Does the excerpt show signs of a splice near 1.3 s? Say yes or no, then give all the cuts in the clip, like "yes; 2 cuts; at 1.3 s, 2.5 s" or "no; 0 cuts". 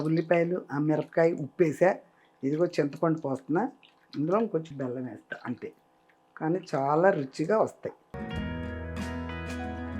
no; 1 cut; at 8.6 s